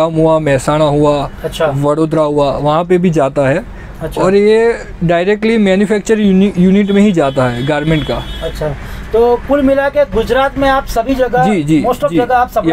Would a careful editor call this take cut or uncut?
uncut